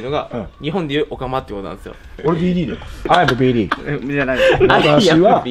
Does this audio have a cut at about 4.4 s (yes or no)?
no